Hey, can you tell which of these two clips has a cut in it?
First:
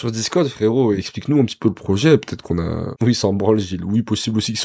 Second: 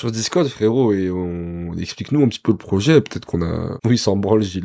first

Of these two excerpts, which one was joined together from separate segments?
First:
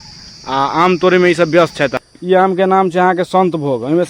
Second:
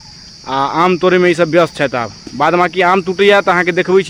first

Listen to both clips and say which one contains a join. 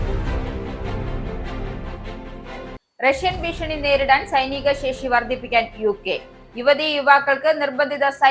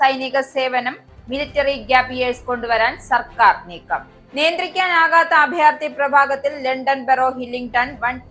first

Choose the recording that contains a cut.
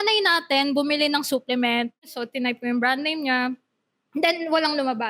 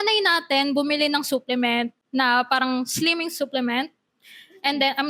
first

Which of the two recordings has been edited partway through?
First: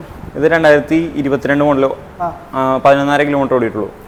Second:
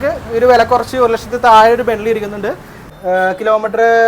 second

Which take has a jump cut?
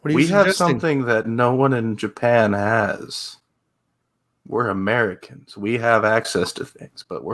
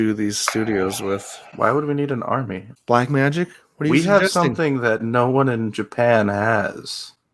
second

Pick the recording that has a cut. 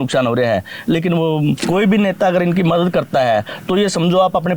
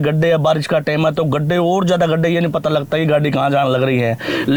first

